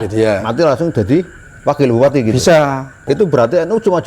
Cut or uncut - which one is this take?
cut